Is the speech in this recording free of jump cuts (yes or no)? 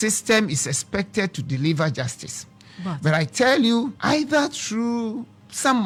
yes